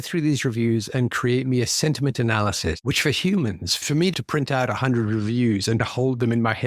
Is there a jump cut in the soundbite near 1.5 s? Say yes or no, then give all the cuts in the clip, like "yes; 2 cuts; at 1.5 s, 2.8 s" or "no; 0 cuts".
no; 2 cuts; at 2.8 s, 4.1 s